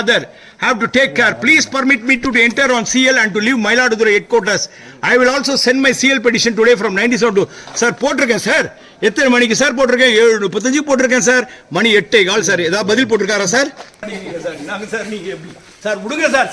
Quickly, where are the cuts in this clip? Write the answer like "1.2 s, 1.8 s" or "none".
14.1 s